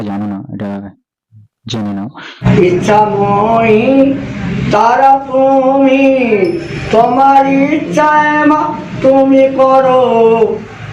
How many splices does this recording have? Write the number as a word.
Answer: one